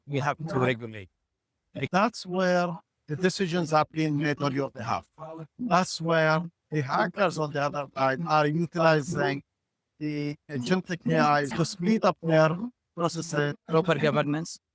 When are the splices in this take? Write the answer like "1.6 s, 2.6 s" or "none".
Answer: 1.9 s, 11.5 s, 13.6 s